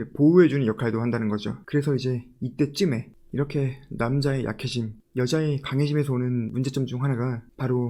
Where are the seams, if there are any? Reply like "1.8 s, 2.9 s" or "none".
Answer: 1.6 s, 6.5 s